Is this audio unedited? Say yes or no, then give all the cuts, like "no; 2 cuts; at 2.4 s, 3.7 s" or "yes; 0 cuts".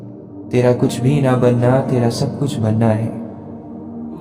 no; 1 cut; at 3.3 s